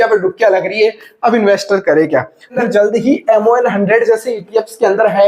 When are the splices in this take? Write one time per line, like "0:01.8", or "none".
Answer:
0:02.6